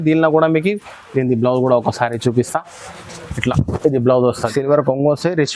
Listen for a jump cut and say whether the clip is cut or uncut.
cut